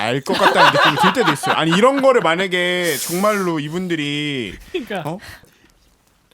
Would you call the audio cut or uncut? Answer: cut